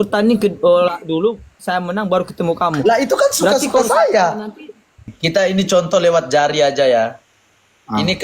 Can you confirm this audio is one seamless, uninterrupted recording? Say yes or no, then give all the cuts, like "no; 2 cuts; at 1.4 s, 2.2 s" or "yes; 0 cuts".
no; 1 cut; at 5.2 s